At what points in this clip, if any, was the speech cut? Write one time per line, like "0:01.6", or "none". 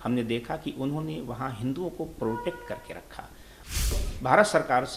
0:03.9